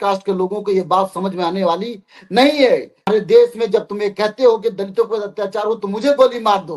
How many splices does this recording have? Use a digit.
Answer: 1